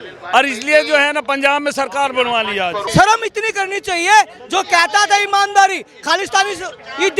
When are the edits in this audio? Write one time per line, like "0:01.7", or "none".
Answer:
0:02.8

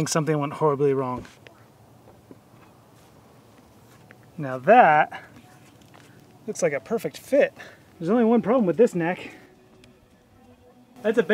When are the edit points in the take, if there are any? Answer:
0:01.4

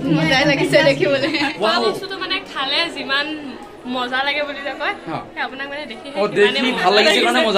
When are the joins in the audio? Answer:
0:01.5

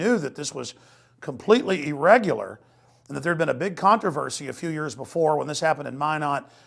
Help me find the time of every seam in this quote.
0:05.0

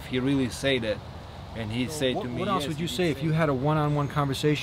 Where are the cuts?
0:02.5

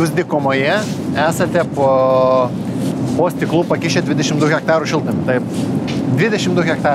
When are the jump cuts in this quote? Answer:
none

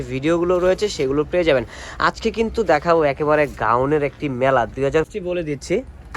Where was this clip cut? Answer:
0:05.1

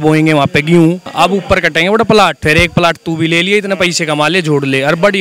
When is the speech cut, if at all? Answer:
0:01.1
0:02.4

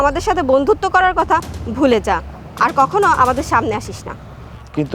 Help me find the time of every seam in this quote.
none

